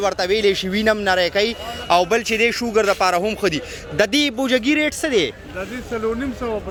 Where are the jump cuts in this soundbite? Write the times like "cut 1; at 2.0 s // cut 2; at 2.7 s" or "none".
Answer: none